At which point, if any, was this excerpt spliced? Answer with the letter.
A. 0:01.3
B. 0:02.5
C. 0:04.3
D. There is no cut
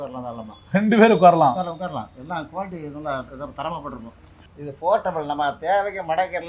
C